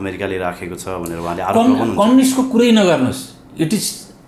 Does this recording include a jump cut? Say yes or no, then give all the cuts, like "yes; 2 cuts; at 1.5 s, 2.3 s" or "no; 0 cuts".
no; 0 cuts